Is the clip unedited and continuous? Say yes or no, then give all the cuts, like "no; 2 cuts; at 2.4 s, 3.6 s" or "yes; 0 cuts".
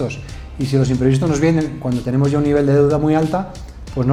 yes; 0 cuts